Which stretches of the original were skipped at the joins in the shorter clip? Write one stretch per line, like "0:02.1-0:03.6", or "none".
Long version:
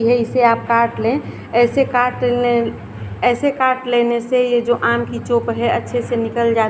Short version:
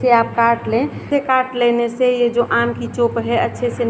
0:01.5-0:03.5